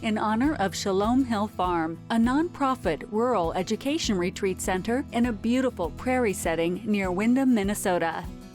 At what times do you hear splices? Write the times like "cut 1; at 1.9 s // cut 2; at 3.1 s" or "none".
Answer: none